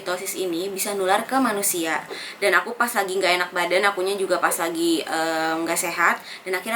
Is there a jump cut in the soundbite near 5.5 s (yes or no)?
no